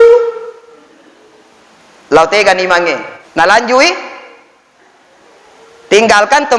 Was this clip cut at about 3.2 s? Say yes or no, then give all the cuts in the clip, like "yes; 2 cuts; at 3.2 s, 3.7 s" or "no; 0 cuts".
yes; 1 cut; at 3.2 s